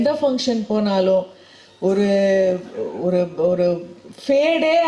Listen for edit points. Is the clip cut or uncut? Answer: uncut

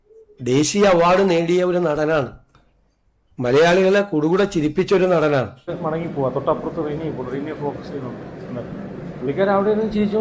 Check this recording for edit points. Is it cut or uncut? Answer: cut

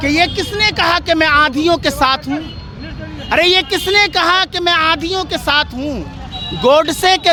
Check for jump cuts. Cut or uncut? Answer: uncut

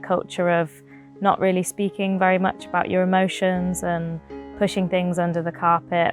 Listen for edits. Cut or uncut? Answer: uncut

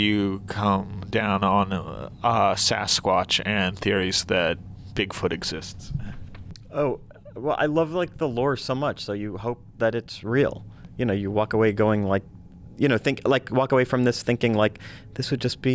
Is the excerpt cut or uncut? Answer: uncut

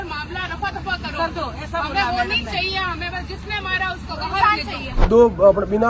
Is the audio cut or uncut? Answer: cut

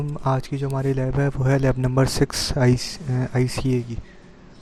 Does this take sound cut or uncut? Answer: uncut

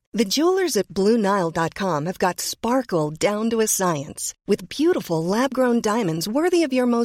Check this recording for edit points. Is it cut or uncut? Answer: uncut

